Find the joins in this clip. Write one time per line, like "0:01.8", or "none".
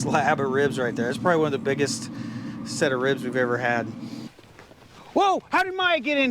0:04.3